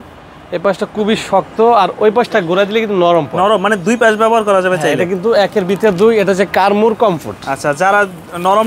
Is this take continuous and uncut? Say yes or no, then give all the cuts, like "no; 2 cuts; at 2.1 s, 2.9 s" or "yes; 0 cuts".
yes; 0 cuts